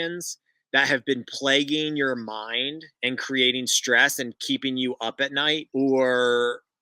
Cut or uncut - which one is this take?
cut